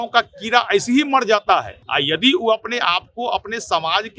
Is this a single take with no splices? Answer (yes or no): no